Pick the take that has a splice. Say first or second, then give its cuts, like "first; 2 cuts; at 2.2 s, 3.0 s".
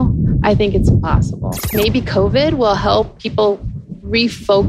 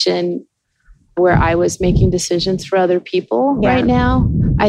first; 1 cut; at 1.7 s